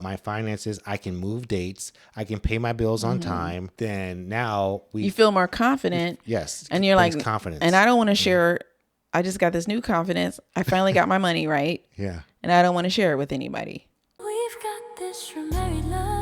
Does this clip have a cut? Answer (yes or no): yes